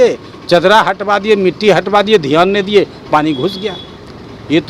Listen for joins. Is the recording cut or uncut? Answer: uncut